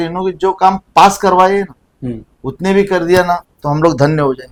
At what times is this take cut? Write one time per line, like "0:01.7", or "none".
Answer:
none